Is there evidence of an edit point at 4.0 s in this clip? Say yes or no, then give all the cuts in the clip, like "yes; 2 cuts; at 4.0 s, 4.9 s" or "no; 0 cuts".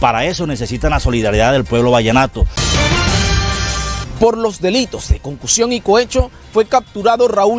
yes; 2 cuts; at 2.5 s, 4.0 s